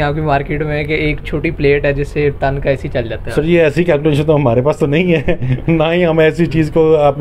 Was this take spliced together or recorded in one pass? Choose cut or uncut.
uncut